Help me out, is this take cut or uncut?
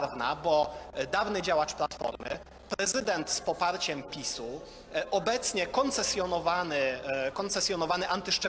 uncut